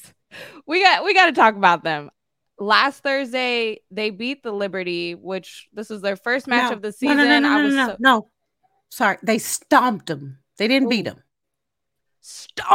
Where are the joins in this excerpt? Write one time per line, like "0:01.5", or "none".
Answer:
0:02.1